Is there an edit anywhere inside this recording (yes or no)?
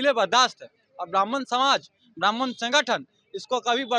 no